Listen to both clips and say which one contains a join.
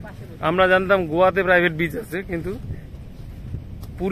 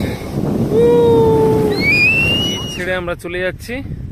second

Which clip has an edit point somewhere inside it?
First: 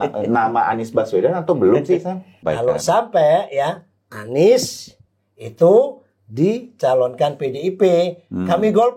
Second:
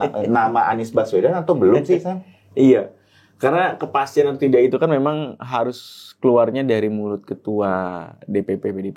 first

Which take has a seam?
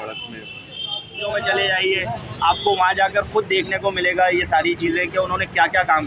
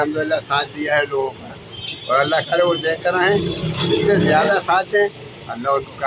first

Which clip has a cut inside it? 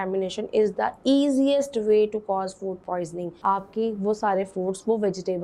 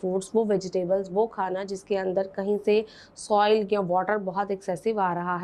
first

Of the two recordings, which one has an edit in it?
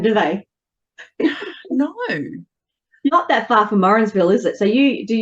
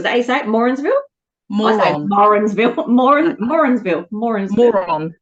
first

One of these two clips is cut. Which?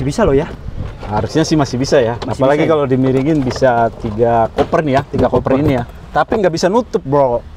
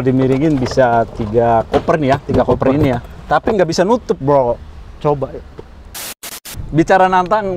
second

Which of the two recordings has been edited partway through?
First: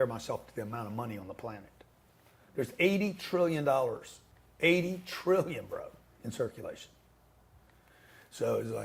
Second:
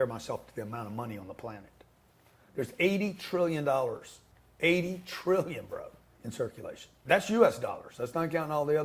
second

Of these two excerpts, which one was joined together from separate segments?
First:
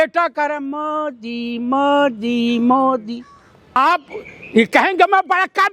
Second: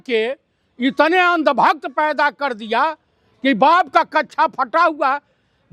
first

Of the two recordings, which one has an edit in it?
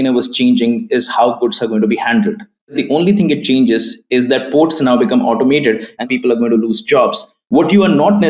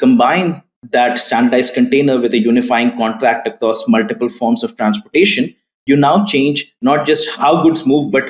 first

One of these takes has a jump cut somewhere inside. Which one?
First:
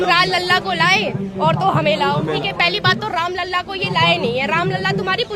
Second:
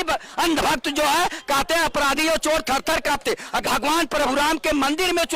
second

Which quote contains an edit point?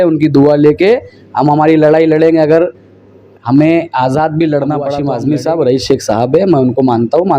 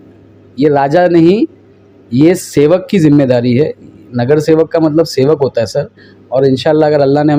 first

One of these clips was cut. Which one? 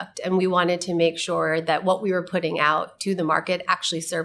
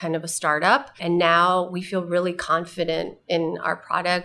second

